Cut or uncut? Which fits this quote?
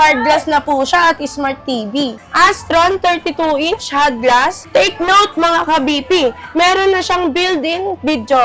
cut